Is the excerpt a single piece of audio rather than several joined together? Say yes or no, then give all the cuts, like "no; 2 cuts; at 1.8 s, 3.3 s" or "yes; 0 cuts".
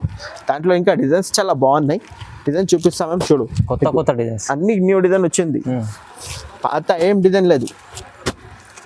yes; 0 cuts